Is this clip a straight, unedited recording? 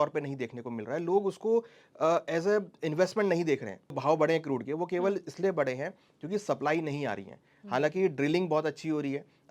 no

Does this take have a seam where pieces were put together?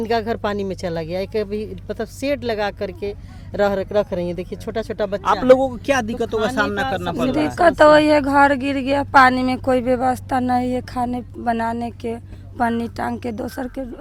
no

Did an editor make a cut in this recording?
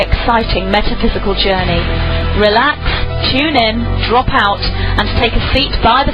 no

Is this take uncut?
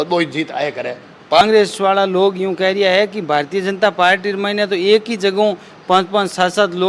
no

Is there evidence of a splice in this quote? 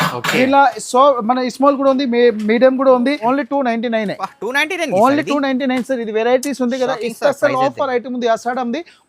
yes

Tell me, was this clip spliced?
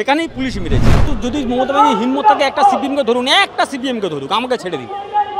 yes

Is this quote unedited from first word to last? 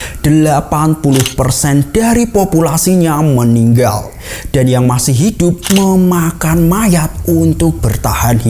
yes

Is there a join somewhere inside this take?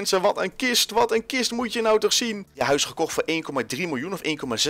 yes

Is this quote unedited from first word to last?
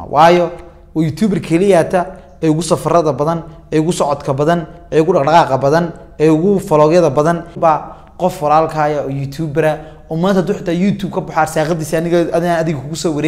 no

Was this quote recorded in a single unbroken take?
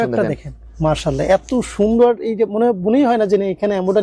yes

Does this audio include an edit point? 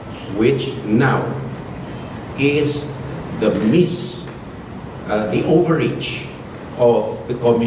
no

